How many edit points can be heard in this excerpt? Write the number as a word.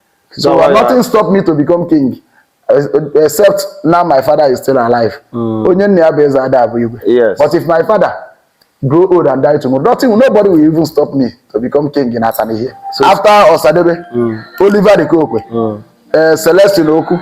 one